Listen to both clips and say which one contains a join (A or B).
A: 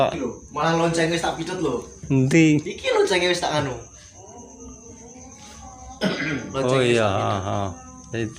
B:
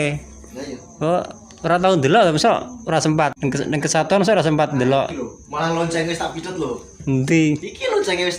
B